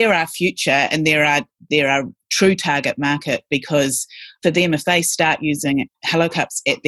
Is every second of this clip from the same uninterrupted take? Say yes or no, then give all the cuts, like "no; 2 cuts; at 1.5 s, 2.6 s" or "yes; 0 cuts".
yes; 0 cuts